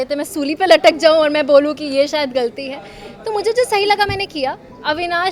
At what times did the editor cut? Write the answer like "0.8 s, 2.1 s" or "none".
none